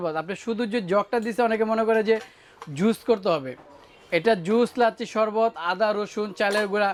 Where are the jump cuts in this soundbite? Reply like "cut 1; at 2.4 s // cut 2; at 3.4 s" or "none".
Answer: none